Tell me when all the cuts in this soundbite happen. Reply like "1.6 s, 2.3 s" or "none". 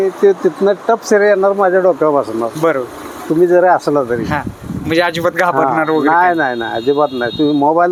none